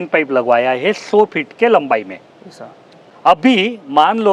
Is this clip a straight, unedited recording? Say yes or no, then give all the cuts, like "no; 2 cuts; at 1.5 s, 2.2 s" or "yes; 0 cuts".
yes; 0 cuts